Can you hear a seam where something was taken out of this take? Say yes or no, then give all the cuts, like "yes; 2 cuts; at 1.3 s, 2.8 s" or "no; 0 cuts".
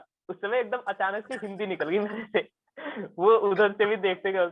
no; 0 cuts